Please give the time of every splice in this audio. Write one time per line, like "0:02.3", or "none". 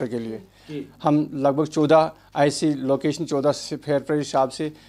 none

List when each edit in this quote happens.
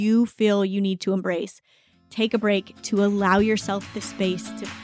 none

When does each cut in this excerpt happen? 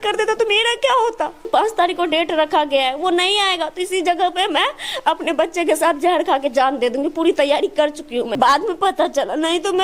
0:01.4
0:08.3

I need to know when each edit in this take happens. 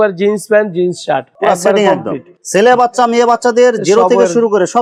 none

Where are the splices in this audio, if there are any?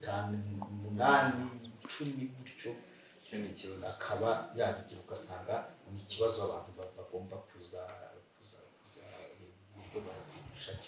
none

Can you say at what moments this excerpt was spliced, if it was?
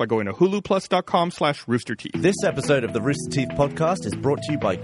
0:02.0

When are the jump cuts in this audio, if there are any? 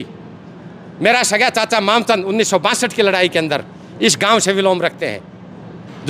none

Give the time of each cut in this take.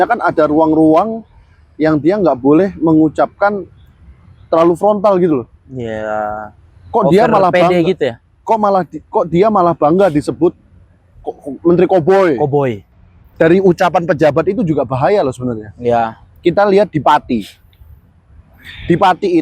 0:13.2

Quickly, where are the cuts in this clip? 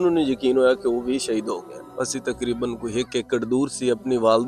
0:01.8

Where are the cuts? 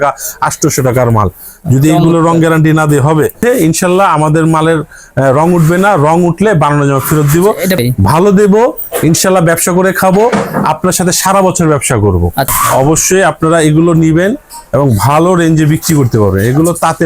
0:03.4
0:07.8
0:12.5

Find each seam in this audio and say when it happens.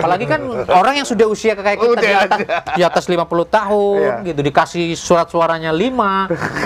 none

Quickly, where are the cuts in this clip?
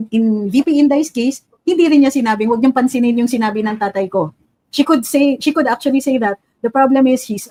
none

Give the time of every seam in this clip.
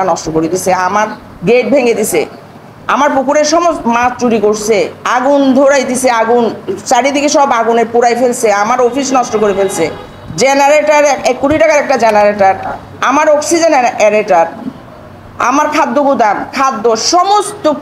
none

